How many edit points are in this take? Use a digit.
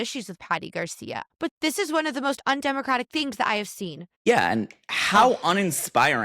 2